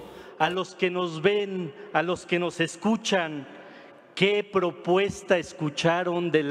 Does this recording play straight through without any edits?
no; 1 cut; at 3.2 s

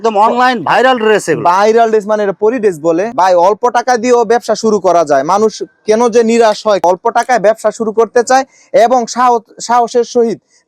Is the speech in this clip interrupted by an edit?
yes; 2 cuts; at 3.1 s, 6.8 s

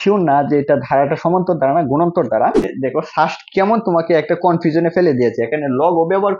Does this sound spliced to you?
yes; 1 cut; at 2.7 s

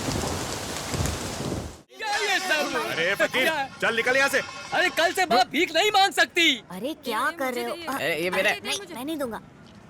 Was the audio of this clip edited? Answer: yes; 1 cut; at 1.8 s

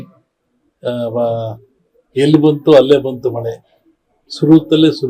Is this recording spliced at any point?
no; 0 cuts

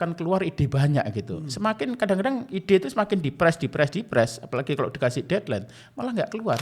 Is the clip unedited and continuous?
yes; 0 cuts

